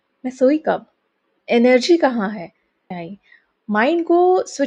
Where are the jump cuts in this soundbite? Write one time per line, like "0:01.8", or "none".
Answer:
0:03.1